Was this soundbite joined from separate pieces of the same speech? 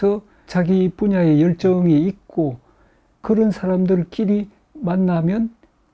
yes; 1 cut; at 3.2 s

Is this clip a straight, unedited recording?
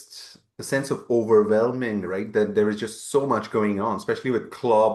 yes; 0 cuts

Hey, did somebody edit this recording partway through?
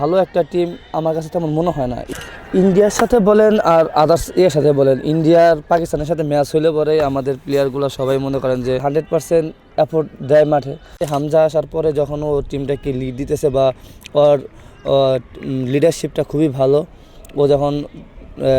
yes; 3 cuts; at 2.1 s, 8.9 s, 11.1 s

